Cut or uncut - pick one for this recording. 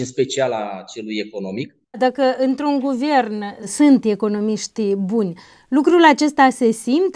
cut